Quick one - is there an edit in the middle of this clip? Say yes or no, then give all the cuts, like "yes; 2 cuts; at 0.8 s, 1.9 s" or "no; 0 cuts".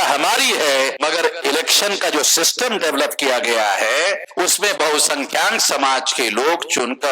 yes; 2 cuts; at 0.9 s, 4.3 s